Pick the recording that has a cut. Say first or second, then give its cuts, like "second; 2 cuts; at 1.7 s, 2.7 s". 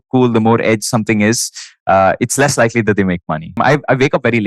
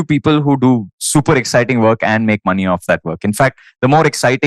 first; 1 cut; at 3.6 s